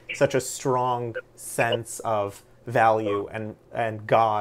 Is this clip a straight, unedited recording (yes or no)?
yes